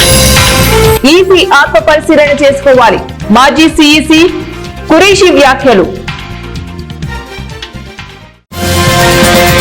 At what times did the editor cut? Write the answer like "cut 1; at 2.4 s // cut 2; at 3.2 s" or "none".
cut 1; at 1.0 s // cut 2; at 6.0 s